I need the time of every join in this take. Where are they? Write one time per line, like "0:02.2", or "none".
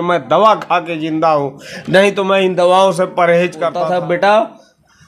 0:03.8